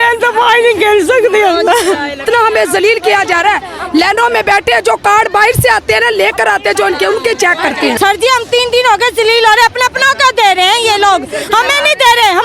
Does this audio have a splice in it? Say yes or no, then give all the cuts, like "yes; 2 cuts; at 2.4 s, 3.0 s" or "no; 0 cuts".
yes; 2 cuts; at 2.2 s, 8.0 s